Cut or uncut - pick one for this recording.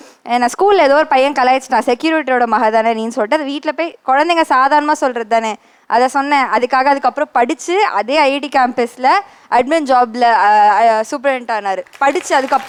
uncut